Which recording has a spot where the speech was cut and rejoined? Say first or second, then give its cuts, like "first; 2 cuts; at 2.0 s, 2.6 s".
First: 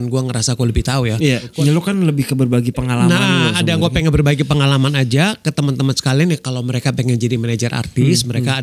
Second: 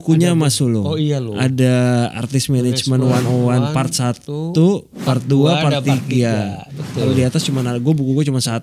first; 1 cut; at 1.5 s